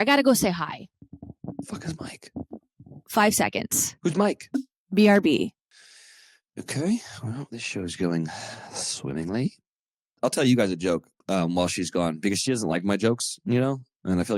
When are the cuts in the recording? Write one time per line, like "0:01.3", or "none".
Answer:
0:10.1